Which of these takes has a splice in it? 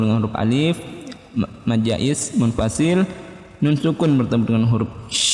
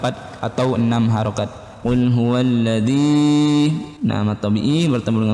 second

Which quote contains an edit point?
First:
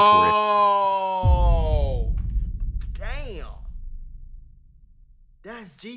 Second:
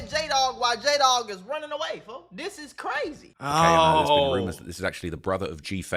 second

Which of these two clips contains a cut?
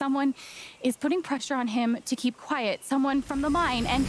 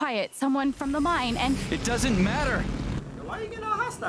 second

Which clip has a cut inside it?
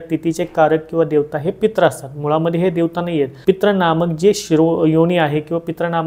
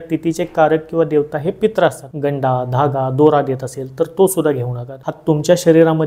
second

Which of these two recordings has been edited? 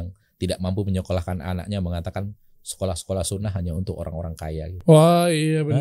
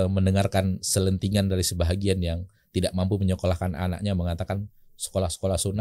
first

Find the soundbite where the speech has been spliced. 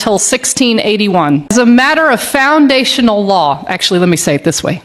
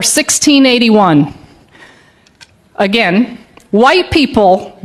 first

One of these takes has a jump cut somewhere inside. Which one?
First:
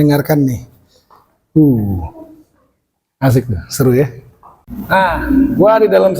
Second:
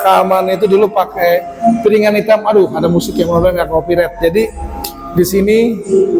first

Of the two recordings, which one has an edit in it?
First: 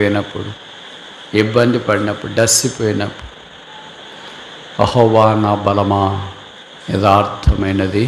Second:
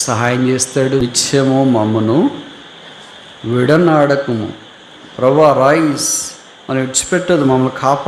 second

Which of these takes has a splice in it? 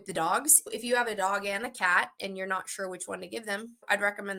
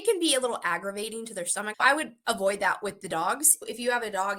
second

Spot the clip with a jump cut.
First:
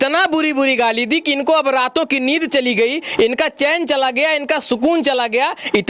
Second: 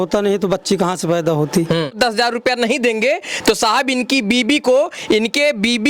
second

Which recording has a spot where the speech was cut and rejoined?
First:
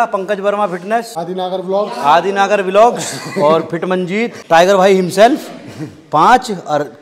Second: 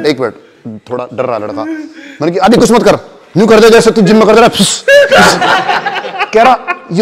first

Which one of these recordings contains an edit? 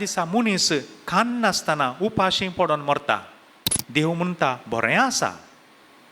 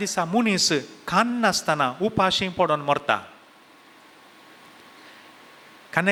first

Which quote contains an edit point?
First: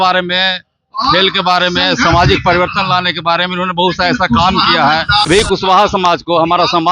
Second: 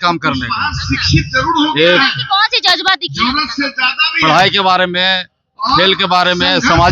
first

